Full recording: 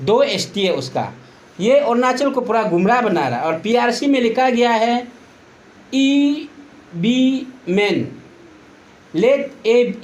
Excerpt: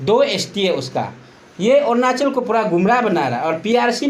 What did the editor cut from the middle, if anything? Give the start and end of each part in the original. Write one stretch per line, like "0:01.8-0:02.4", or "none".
none

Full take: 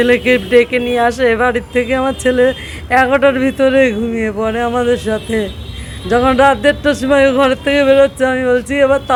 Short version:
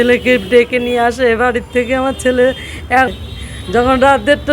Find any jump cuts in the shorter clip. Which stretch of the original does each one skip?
0:03.1-0:05.5

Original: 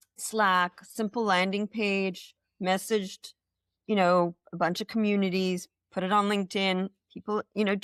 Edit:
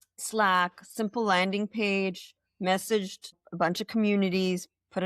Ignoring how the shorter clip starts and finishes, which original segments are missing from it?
0:03.4-0:04.4

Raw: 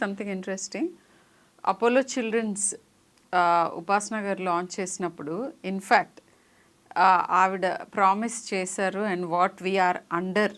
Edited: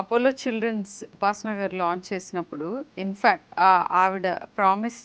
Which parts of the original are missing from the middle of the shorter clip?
0:02.8-0:03.8
0:06.1-0:06.8

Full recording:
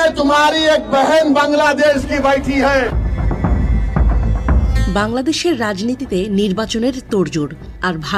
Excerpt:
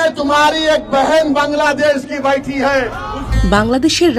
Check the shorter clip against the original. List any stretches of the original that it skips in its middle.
0:03.3-0:04.7

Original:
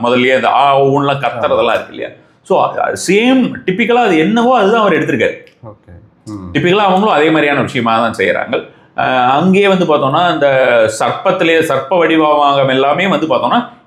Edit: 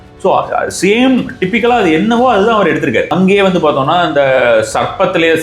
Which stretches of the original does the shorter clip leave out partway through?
0:05.4-0:09.4

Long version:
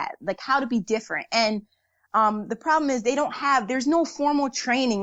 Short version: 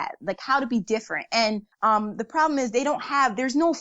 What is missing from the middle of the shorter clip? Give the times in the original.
0:01.7-0:02.0

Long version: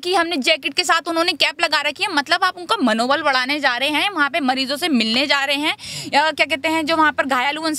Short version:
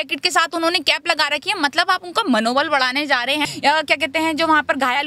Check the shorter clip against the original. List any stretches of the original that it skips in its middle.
0:04.0-0:06.0

